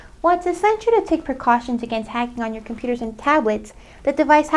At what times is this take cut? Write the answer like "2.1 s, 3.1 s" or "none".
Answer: none

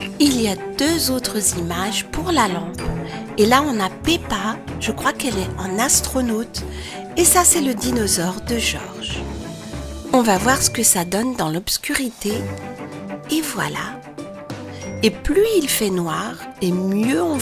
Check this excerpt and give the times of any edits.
none

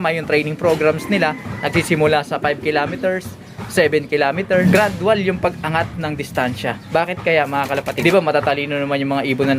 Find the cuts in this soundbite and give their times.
4.6 s, 8.0 s

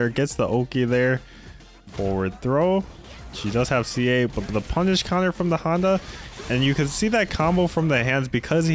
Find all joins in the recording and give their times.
none

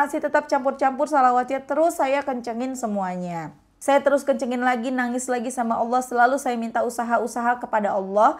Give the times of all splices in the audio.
3.6 s

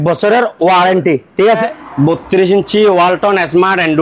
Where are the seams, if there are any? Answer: 1.6 s

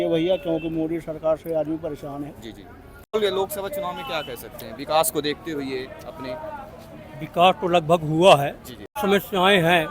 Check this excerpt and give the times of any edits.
3.1 s, 9.0 s

